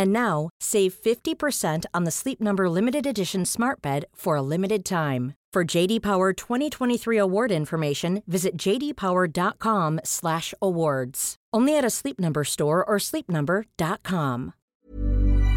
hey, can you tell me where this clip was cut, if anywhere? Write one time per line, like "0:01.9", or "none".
0:14.6

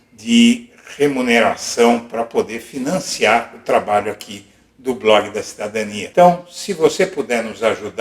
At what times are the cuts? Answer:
none

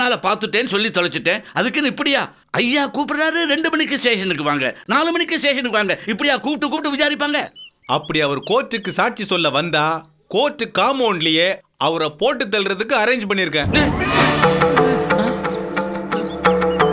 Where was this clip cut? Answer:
0:07.6

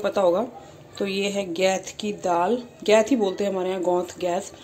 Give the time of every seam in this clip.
none

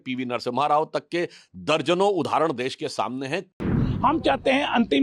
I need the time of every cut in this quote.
0:03.8

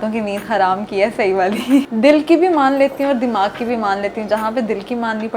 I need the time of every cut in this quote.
0:01.8

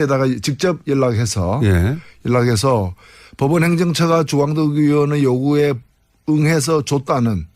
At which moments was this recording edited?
none

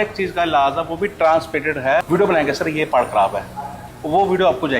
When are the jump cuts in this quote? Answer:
0:02.1

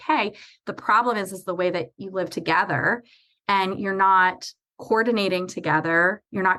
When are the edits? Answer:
none

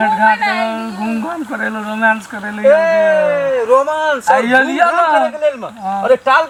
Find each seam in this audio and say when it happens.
none

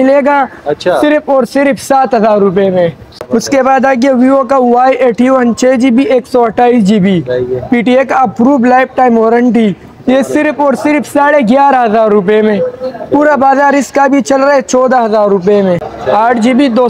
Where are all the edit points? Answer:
0:03.1
0:15.9

